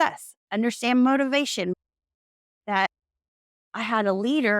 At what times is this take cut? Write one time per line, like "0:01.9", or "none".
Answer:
0:01.7
0:02.9